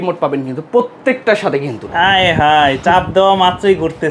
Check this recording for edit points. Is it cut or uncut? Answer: cut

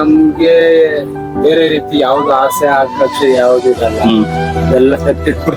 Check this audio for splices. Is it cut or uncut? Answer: uncut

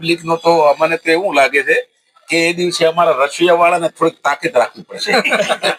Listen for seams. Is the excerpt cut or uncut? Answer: uncut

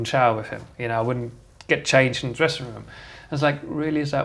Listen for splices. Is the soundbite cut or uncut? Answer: uncut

